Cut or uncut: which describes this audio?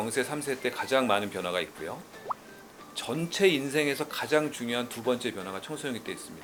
uncut